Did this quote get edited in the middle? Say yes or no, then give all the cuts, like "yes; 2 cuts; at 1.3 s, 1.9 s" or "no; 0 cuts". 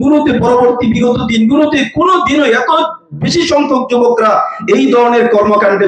no; 0 cuts